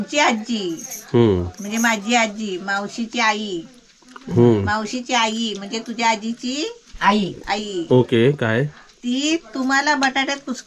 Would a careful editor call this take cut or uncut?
uncut